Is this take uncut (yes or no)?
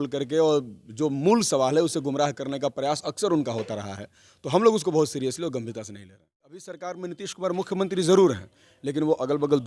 no